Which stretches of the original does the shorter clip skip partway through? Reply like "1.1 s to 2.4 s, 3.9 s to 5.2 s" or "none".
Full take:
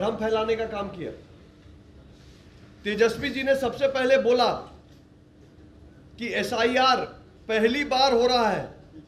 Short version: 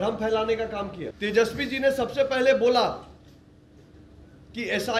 1.1 s to 2.7 s